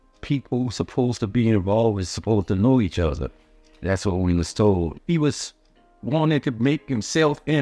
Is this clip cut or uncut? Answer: uncut